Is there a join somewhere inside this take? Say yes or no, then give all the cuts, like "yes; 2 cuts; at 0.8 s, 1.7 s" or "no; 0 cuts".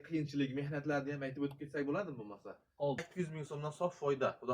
yes; 1 cut; at 3.1 s